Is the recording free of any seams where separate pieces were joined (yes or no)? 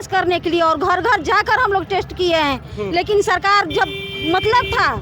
yes